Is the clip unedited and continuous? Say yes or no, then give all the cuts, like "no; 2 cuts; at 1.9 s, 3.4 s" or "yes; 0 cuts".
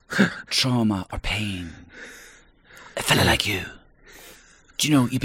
yes; 0 cuts